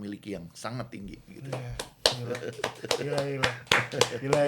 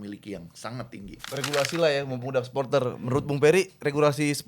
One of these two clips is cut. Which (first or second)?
second